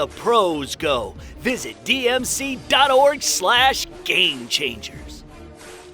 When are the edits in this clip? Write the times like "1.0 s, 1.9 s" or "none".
4.8 s